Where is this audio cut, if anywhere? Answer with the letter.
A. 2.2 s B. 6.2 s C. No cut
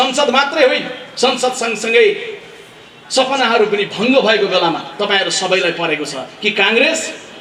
C